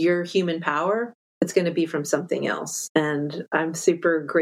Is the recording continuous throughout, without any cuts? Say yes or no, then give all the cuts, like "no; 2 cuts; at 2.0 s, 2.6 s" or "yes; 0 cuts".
yes; 0 cuts